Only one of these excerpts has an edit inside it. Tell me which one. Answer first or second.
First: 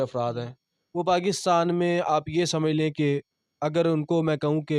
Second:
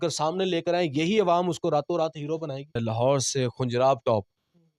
second